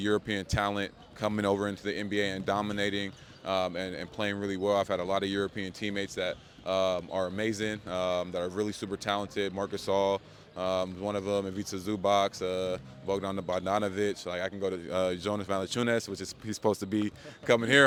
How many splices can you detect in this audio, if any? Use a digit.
0